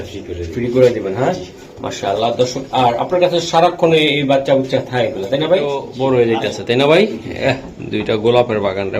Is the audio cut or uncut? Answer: cut